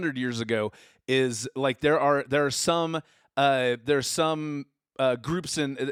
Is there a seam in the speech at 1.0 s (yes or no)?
no